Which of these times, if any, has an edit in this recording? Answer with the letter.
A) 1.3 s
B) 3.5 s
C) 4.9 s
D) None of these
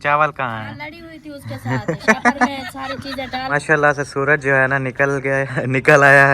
B